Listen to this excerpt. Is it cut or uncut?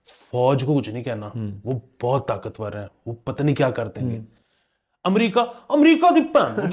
uncut